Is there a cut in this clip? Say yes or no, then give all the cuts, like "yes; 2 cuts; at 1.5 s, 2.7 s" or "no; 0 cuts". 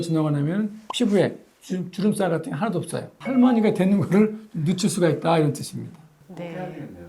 yes; 1 cut; at 3.1 s